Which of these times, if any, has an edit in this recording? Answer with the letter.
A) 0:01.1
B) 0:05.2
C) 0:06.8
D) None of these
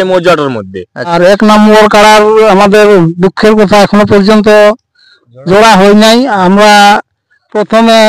A